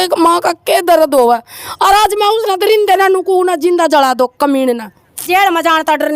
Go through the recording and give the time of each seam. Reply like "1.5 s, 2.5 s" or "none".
5.2 s